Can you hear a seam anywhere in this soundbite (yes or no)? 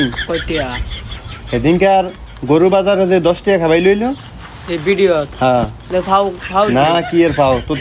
no